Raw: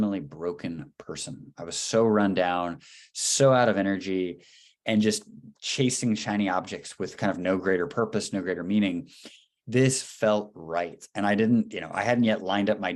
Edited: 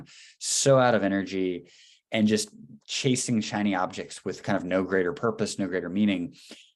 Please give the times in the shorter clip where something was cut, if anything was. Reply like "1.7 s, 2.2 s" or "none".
none

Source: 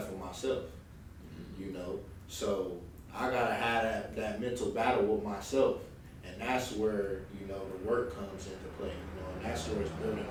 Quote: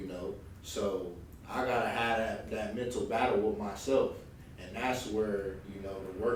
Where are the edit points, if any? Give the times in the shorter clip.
none

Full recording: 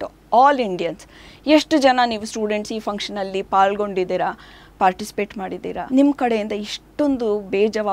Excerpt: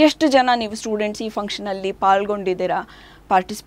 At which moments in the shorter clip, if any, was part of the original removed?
none

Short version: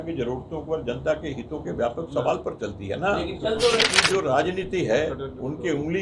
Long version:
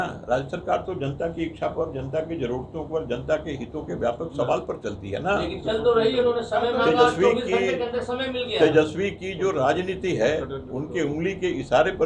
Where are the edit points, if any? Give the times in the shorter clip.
3.9 s

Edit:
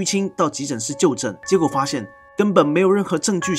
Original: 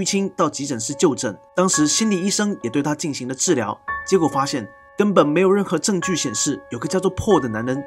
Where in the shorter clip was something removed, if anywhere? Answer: 1.4 s

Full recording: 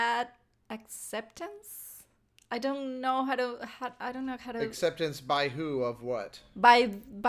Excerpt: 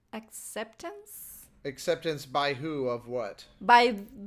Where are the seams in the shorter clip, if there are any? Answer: 1.8 s

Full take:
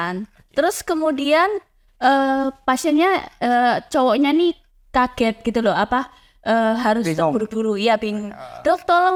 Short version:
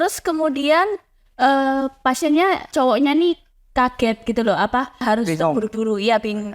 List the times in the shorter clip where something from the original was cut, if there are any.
2.7 s, 5.0 s

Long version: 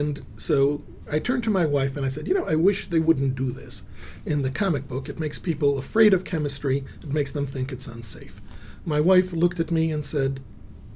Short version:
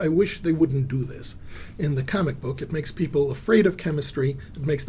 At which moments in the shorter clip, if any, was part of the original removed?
none

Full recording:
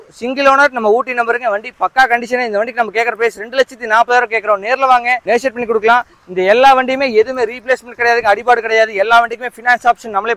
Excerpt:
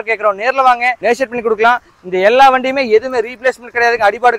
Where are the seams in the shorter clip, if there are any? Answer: none

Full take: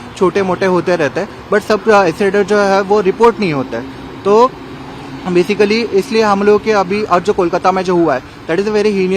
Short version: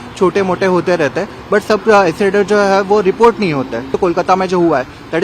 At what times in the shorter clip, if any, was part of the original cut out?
3.9 s

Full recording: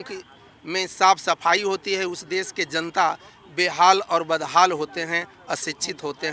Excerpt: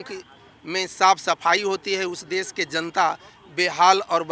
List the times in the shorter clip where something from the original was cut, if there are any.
none

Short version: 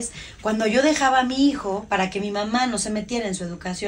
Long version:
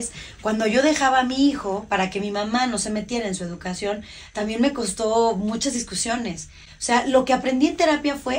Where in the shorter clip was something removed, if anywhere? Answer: none

